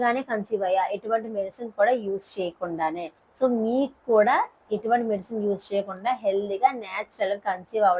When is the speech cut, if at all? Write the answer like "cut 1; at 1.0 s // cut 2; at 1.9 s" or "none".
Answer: none